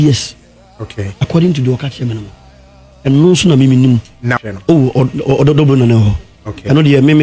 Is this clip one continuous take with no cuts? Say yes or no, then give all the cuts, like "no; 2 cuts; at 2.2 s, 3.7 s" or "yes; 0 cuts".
no; 1 cut; at 4.4 s